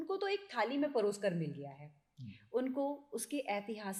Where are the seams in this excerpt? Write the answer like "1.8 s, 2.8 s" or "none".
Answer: none